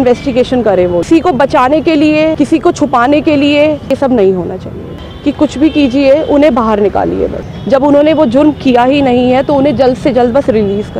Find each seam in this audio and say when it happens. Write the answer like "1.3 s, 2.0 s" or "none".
1.0 s, 2.3 s, 3.9 s, 4.9 s, 7.5 s